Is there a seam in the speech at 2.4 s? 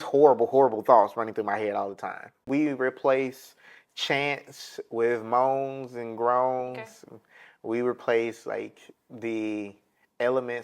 yes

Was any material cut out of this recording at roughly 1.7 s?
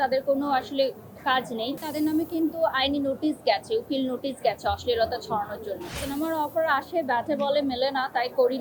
yes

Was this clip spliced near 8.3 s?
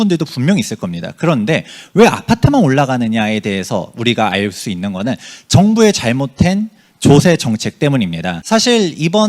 yes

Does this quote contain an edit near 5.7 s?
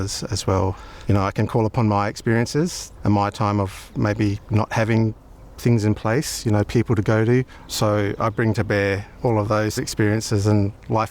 no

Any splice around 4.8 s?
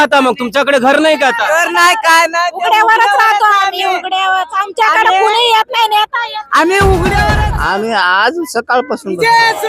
no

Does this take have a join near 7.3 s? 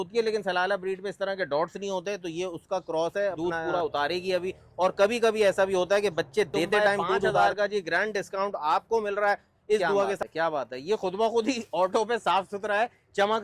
yes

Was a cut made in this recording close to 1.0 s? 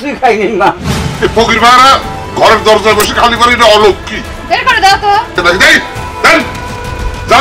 yes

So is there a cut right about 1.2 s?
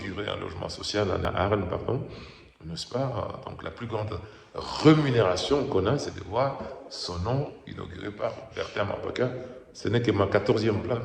yes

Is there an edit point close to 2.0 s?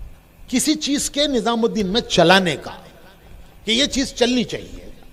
no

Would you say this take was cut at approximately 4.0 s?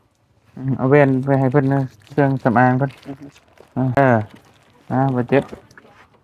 yes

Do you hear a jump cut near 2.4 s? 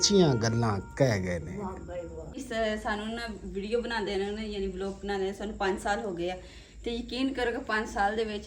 yes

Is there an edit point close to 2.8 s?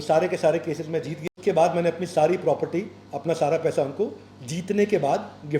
no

